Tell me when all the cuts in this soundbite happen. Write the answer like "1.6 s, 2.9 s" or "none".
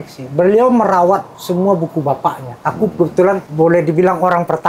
1.3 s, 2.5 s, 3.5 s